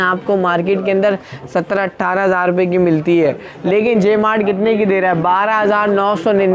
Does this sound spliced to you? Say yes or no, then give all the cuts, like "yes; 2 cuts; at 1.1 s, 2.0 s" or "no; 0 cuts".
no; 0 cuts